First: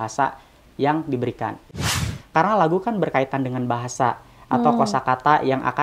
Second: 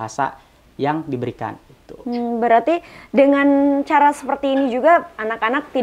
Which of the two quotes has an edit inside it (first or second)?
first